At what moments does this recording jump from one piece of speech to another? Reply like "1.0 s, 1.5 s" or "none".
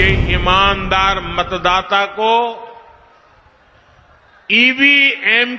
none